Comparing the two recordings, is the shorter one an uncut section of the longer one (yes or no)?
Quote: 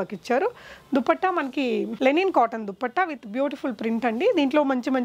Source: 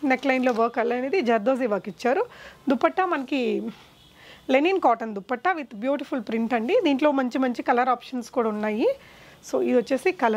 no